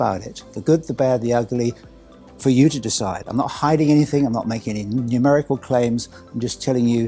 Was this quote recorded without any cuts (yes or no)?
yes